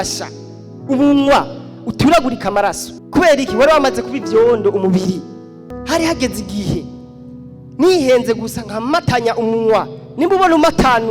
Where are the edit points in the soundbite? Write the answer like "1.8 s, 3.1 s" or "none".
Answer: 2.9 s, 5.6 s